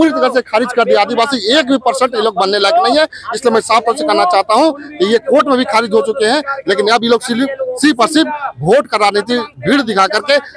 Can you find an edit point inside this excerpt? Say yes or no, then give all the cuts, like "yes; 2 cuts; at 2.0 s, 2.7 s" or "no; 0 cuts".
no; 0 cuts